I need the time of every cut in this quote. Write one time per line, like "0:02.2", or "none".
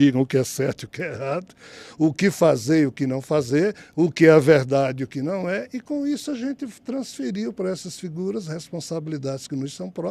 none